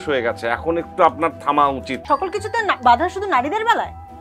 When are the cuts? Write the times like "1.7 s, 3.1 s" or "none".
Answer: 1.9 s